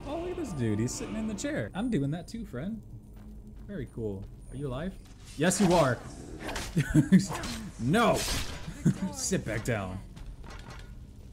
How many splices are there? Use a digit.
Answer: 1